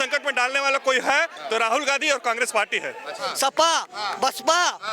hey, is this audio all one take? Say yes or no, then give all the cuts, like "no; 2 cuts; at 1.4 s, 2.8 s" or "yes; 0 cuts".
no; 1 cut; at 3.2 s